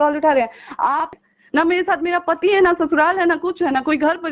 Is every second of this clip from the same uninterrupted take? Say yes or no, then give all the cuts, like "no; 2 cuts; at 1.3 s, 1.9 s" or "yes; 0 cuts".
no; 1 cut; at 1.1 s